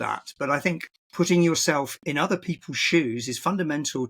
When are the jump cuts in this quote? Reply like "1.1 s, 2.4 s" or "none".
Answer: 1.0 s, 2.0 s